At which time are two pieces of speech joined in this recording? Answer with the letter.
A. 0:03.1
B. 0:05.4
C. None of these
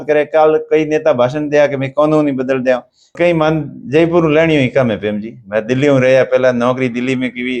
A